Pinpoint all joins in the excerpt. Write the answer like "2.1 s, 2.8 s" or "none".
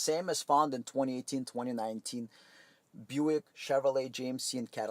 none